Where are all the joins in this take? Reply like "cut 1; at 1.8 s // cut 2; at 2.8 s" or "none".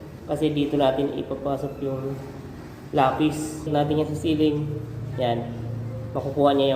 cut 1; at 3.7 s